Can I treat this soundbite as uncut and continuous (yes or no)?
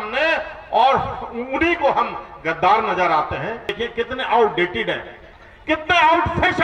no